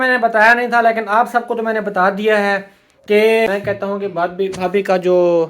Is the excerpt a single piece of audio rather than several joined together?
no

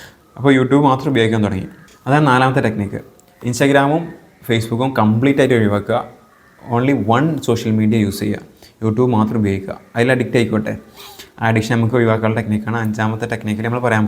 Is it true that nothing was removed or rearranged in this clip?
yes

